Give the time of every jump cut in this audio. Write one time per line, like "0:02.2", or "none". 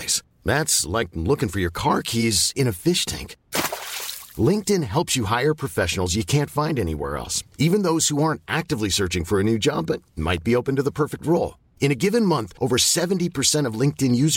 none